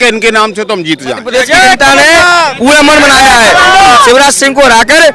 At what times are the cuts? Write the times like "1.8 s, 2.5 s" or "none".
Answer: 1.2 s